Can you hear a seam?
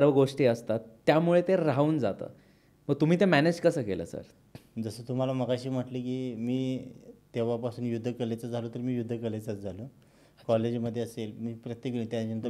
no; 0 cuts

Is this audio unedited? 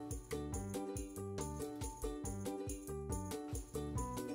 yes; 0 cuts

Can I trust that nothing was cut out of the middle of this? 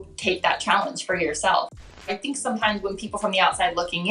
no; 1 cut; at 1.8 s

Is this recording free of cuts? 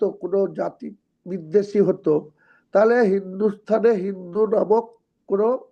yes; 0 cuts

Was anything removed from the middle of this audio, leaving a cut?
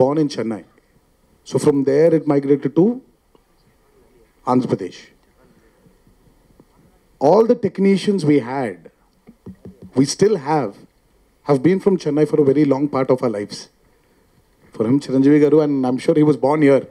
no; 0 cuts

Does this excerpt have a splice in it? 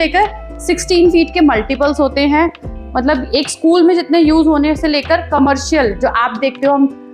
no; 0 cuts

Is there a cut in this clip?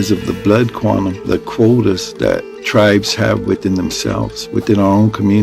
yes; 1 cut; at 1.2 s

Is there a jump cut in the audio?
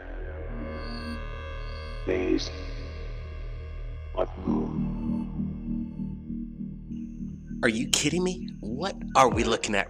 no; 0 cuts

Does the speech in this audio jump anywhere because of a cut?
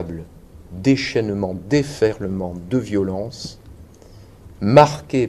no; 0 cuts

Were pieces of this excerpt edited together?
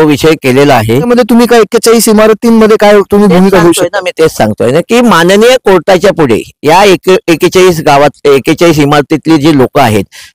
yes; 1 cut; at 1.1 s

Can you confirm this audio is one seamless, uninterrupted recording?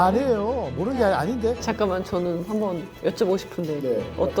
no; 1 cut; at 1.6 s

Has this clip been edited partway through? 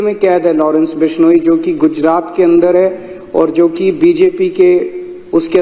no; 0 cuts

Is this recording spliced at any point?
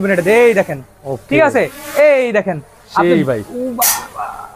no; 0 cuts

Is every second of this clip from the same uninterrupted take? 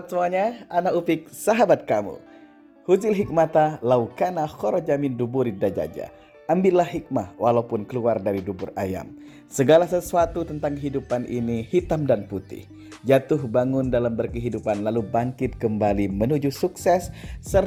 yes; 0 cuts

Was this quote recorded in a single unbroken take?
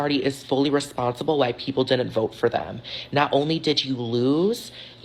yes; 0 cuts

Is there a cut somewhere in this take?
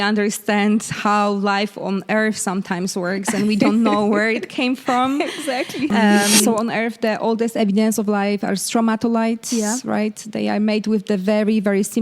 yes; 1 cut; at 6.5 s

